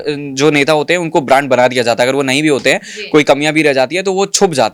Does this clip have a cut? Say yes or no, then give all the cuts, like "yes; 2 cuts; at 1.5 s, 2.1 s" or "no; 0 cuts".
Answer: no; 0 cuts